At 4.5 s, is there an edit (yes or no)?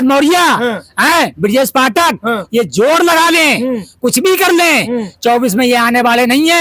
no